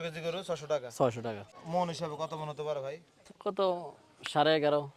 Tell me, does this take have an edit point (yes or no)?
yes